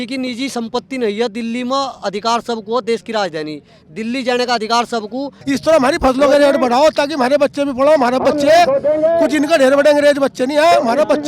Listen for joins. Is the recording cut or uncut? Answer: cut